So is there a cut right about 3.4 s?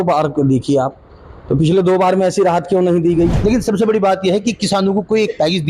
yes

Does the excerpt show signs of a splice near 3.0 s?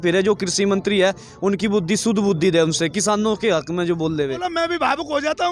no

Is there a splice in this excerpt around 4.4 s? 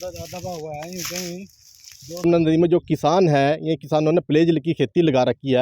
no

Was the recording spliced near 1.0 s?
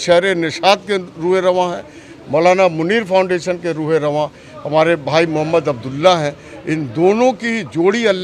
no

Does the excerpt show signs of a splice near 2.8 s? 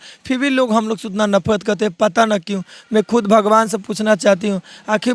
no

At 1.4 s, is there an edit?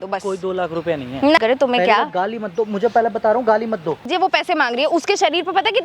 yes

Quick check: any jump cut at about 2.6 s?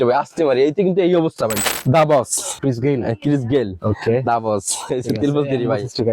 yes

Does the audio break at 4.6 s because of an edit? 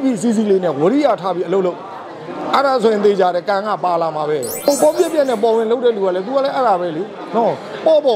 yes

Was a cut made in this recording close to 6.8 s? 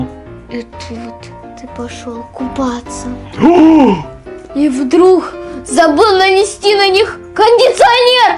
no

